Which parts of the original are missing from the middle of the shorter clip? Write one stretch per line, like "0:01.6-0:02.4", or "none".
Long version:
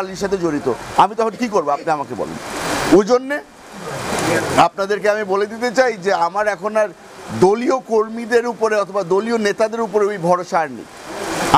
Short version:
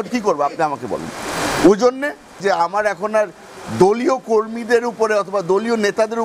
0:03.6-0:06.0